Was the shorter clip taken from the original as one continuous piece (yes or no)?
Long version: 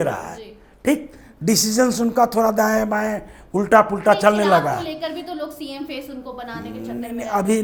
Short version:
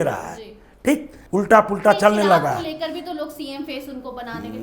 no